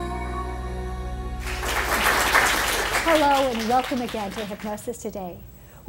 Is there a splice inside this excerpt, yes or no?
yes